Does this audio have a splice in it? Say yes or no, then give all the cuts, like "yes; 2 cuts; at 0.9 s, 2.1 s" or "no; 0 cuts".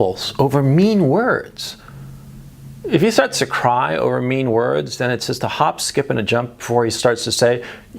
no; 0 cuts